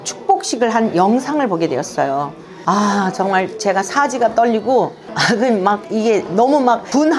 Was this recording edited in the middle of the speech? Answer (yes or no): yes